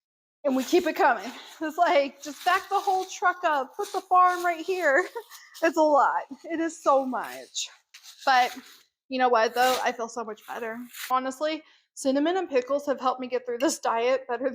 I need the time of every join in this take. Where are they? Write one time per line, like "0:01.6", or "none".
0:10.9